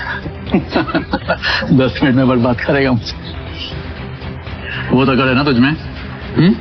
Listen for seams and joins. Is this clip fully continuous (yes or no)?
yes